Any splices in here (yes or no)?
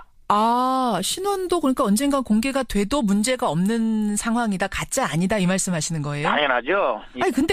yes